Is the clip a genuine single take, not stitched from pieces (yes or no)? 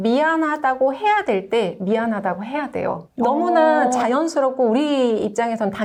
yes